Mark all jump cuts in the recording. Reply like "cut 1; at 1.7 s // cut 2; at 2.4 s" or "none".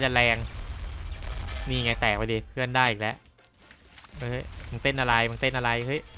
none